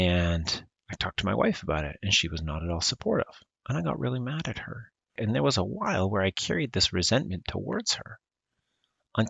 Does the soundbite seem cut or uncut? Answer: cut